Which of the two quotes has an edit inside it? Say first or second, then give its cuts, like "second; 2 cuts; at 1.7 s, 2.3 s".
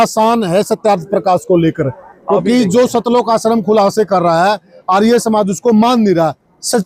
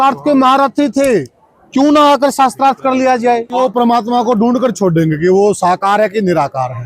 second; 1 cut; at 3.6 s